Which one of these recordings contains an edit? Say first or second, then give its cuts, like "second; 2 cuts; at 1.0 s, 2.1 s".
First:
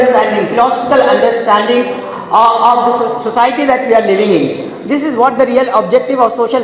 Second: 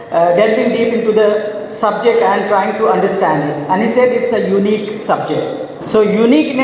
second; 1 cut; at 5.7 s